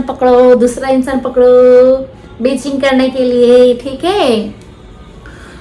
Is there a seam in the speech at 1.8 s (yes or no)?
no